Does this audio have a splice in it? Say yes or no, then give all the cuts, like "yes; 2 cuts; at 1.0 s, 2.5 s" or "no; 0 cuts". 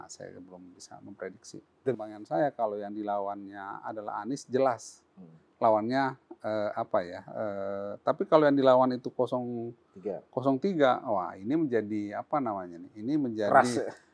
yes; 1 cut; at 2.0 s